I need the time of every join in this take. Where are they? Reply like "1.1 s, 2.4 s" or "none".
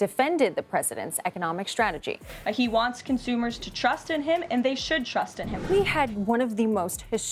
5.7 s